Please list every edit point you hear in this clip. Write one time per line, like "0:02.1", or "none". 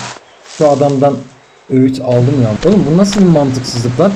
0:02.6